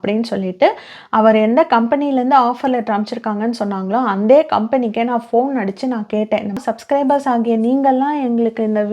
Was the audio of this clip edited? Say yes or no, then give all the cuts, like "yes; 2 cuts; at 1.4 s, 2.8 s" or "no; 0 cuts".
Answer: yes; 1 cut; at 6.6 s